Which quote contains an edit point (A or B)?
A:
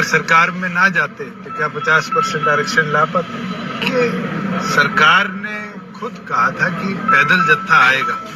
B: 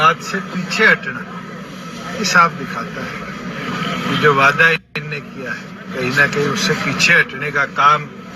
A